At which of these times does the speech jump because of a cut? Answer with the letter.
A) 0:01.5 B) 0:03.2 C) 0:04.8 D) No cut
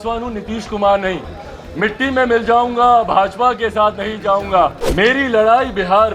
C